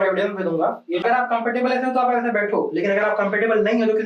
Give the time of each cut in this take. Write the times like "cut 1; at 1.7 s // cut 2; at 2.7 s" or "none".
cut 1; at 1.0 s